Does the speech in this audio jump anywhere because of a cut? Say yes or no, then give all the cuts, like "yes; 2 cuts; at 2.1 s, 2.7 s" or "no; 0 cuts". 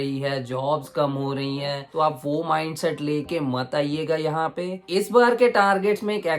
yes; 2 cuts; at 1.9 s, 4.8 s